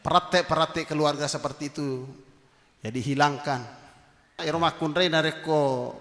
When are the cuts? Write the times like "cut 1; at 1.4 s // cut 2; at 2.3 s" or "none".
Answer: cut 1; at 4.4 s